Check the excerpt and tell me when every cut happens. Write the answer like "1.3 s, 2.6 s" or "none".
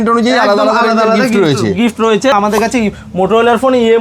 2.3 s